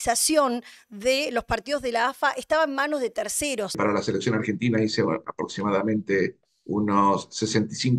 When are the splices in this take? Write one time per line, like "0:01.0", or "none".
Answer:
0:03.8